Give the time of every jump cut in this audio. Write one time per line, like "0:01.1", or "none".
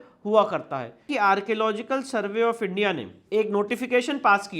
0:01.1